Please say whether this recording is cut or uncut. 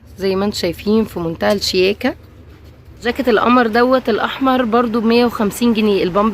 cut